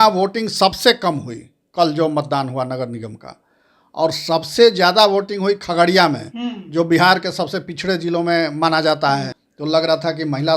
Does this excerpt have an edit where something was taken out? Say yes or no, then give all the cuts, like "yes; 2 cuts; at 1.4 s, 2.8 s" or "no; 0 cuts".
yes; 1 cut; at 9.4 s